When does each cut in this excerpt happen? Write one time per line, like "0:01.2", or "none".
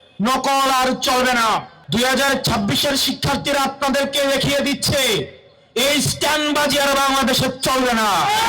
0:01.8